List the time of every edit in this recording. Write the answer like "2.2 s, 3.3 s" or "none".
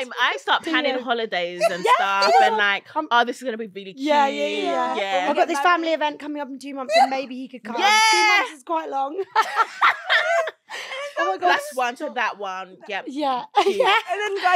none